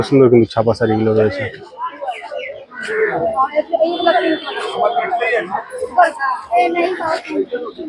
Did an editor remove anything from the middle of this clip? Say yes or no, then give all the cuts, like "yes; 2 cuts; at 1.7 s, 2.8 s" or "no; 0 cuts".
no; 0 cuts